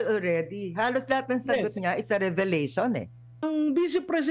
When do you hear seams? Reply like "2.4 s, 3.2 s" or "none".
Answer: 3.4 s